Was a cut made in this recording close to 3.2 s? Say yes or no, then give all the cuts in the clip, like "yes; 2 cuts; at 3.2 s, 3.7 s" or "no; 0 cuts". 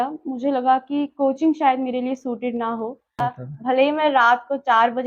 yes; 1 cut; at 3.2 s